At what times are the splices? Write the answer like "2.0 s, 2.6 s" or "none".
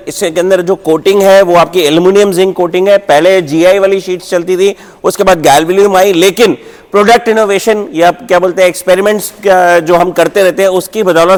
none